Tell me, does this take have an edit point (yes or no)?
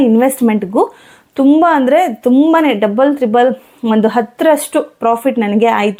no